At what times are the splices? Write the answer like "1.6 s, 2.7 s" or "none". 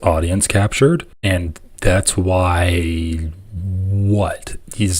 1.1 s